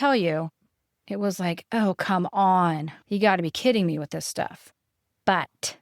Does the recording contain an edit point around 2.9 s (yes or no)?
yes